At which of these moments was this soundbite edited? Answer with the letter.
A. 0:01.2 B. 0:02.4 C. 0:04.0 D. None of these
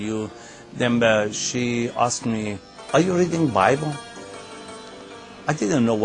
D